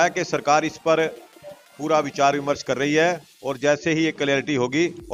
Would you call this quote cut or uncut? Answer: uncut